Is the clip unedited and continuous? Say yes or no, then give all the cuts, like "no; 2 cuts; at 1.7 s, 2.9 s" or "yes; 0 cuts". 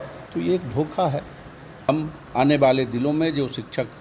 no; 1 cut; at 1.9 s